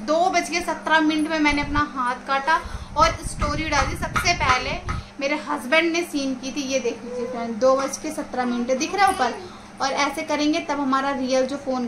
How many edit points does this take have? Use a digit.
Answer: 0